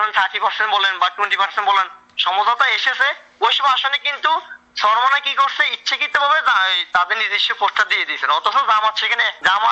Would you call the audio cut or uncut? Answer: uncut